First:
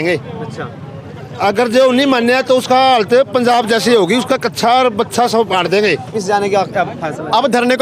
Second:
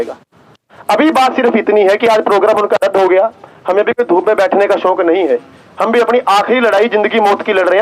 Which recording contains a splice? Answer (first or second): first